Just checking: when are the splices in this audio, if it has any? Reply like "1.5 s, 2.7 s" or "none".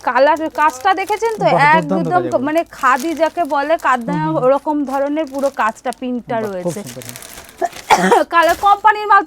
none